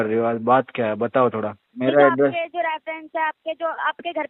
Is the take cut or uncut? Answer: cut